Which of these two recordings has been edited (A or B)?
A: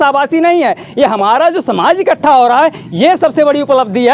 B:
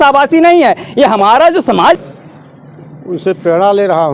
B